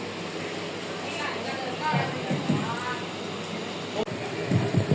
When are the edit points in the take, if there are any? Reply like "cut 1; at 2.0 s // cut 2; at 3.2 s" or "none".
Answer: none